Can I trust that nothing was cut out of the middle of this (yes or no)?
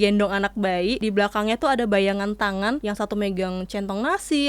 no